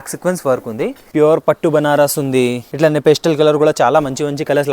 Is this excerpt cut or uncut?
cut